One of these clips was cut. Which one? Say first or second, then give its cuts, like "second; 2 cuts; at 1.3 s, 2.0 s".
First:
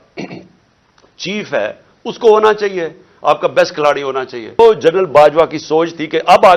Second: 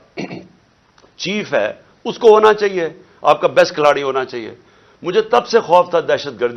first; 1 cut; at 4.6 s